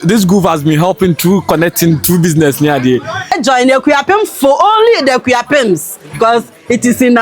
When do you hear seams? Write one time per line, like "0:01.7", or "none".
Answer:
0:03.3